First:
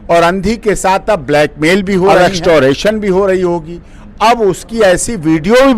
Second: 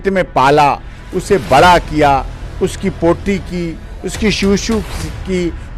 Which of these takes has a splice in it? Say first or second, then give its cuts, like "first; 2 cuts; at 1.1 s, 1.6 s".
first; 1 cut; at 2.1 s